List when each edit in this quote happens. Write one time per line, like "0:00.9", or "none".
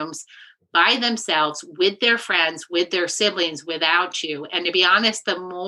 none